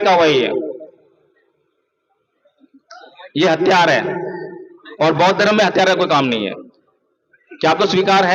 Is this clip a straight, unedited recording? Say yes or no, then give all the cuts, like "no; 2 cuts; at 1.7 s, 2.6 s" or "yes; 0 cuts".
yes; 0 cuts